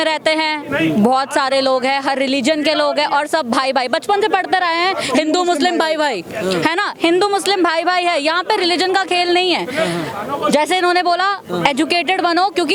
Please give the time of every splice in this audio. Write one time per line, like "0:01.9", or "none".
none